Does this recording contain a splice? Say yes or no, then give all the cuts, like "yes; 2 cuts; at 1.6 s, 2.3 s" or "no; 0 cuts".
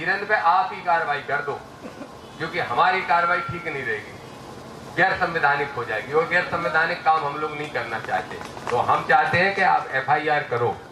no; 0 cuts